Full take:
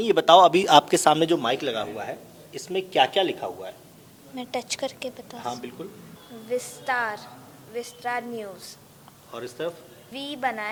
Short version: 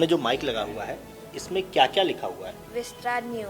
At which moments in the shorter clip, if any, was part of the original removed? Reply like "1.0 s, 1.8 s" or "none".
2.6 s